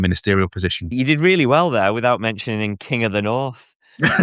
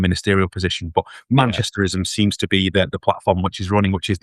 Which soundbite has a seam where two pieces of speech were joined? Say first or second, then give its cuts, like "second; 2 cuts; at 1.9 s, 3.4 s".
first; 1 cut; at 0.9 s